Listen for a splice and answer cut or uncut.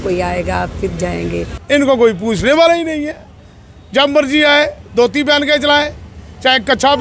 cut